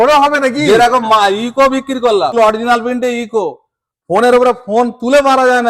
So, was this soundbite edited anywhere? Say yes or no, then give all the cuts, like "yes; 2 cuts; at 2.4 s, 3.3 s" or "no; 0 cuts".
yes; 1 cut; at 2.3 s